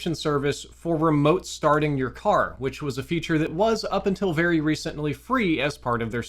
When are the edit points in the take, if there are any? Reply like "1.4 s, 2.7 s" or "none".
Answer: none